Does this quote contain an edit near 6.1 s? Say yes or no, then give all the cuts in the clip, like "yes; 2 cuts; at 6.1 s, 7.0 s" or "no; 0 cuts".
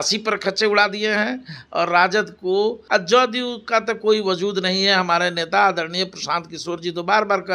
no; 1 cut; at 2.8 s